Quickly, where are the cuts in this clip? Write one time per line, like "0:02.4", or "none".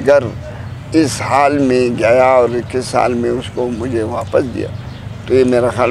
none